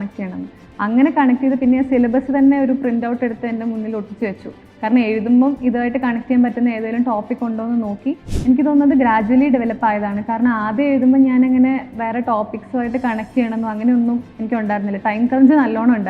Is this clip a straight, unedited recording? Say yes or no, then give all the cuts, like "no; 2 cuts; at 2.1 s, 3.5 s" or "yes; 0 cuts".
no; 1 cut; at 8.3 s